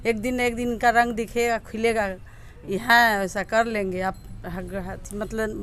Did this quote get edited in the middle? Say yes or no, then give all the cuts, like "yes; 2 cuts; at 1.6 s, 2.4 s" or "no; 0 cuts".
no; 0 cuts